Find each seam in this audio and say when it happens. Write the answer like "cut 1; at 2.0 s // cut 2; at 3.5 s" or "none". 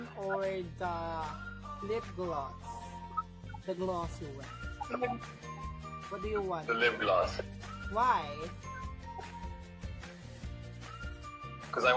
none